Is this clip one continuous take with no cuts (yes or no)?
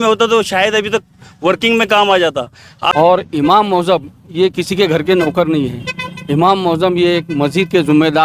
no